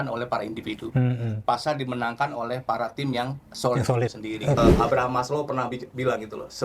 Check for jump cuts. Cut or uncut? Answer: cut